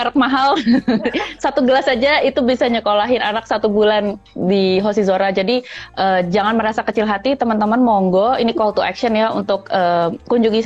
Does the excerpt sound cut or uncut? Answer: uncut